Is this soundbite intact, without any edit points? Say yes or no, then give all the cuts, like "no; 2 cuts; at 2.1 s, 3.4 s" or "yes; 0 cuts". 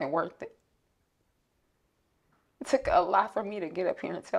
yes; 0 cuts